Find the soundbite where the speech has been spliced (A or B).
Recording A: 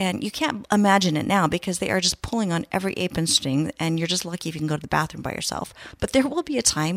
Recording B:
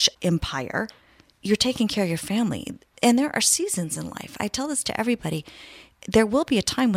A